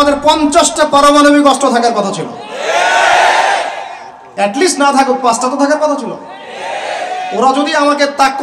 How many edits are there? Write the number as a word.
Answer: zero